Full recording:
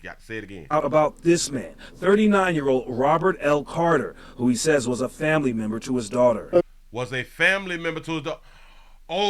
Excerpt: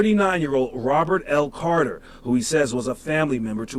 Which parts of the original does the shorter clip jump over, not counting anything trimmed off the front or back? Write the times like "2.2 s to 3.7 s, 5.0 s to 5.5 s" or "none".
none